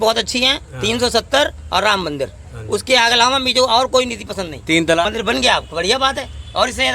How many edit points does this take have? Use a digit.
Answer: 1